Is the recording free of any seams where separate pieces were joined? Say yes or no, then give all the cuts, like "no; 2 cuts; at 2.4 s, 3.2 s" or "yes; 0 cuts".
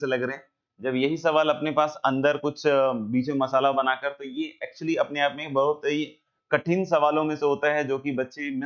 yes; 0 cuts